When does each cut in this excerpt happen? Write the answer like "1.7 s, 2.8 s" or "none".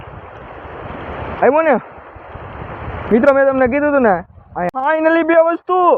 4.7 s